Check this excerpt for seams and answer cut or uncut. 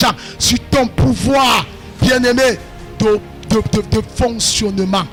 uncut